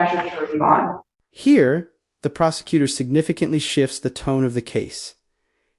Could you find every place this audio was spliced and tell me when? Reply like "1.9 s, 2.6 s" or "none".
none